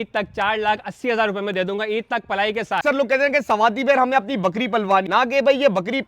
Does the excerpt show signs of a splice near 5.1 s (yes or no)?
yes